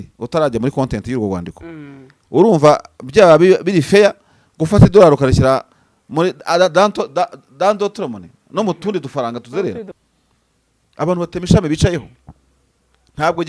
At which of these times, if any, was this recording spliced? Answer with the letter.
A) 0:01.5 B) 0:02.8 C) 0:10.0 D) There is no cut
C